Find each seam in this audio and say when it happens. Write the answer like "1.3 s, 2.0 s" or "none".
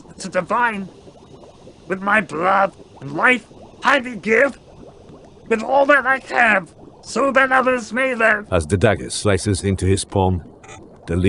8.4 s